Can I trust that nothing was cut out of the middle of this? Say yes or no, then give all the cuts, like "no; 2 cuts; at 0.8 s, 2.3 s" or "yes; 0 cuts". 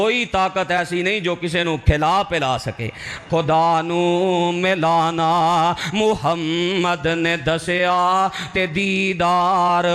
no; 1 cut; at 3.1 s